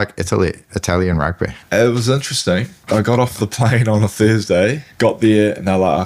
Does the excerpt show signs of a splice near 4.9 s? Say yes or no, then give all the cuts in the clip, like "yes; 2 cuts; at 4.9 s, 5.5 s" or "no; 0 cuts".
yes; 3 cuts; at 1.6 s, 2.7 s, 4.9 s